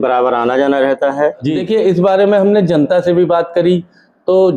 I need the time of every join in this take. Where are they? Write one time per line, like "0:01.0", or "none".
0:01.5